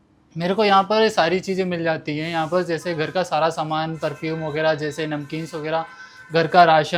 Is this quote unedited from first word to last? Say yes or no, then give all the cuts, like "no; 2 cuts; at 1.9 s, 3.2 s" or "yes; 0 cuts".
yes; 0 cuts